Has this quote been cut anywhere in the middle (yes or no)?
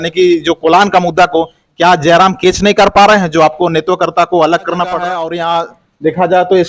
yes